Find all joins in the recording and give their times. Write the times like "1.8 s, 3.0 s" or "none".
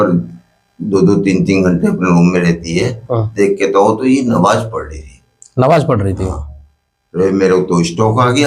none